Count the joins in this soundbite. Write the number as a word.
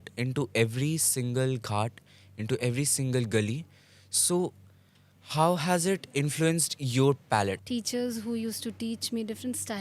one